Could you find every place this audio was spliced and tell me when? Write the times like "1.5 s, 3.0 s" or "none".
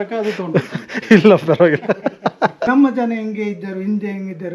2.7 s